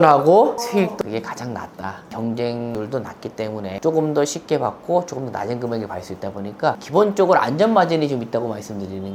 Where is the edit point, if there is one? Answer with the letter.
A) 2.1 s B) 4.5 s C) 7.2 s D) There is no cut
A